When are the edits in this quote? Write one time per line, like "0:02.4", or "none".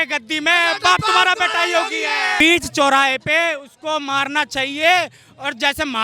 0:02.4

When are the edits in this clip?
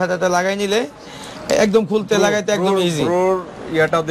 none

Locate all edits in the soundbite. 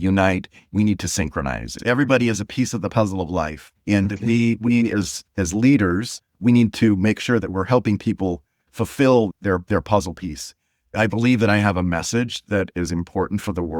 0:01.7
0:09.3
0:10.9

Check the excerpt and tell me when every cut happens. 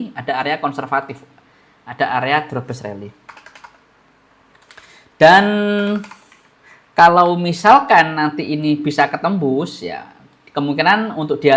none

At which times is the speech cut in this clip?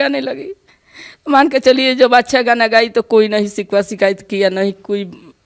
none

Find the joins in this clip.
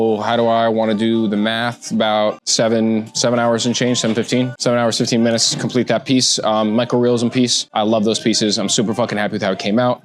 0:02.4
0:04.5
0:07.6

